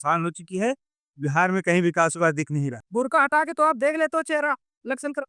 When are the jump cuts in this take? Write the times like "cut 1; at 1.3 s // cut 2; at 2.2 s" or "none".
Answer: cut 1; at 2.8 s

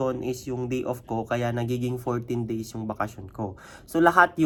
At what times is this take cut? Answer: none

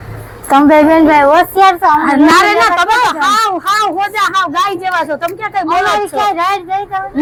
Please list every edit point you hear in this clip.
none

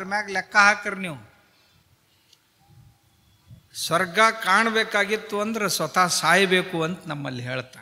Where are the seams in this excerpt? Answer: cut 1; at 1.8 s

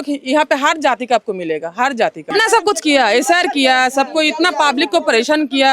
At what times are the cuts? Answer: cut 1; at 2.3 s

